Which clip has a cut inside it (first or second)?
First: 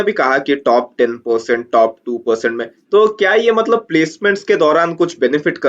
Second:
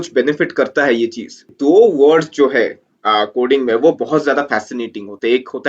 second